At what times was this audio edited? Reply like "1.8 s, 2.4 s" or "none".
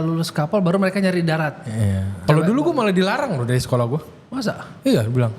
2.1 s